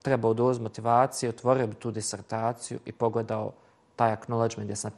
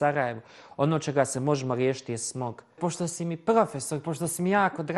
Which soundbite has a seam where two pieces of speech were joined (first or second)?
second